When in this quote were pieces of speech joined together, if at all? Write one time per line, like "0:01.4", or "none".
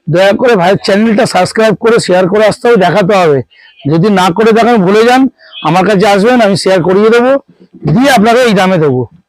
none